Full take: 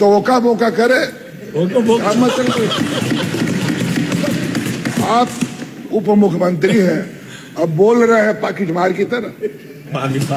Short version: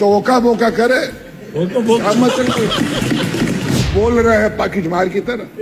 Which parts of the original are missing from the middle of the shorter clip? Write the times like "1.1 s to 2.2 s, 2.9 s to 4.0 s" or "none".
3.9 s to 7.7 s